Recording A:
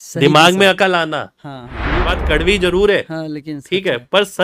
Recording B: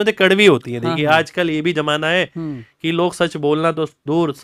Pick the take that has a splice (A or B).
A